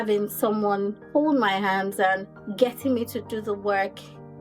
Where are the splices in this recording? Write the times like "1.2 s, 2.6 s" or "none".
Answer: 1.0 s, 2.4 s